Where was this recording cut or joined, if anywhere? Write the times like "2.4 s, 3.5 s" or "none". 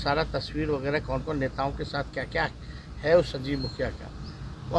none